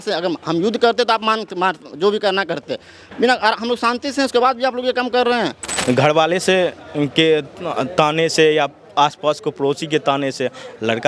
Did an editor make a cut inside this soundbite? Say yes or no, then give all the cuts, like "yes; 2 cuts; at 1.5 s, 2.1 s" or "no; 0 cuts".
yes; 1 cut; at 5.6 s